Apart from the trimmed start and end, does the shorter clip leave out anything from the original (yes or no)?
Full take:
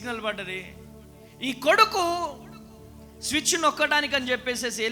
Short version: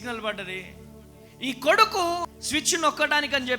yes